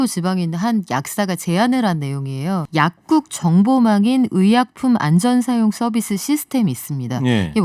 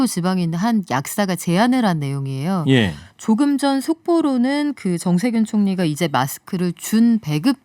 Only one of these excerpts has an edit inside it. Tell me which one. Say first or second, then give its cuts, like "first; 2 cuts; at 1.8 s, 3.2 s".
first; 1 cut; at 2.6 s